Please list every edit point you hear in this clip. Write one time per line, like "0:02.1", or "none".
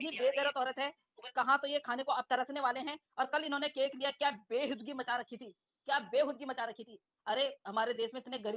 none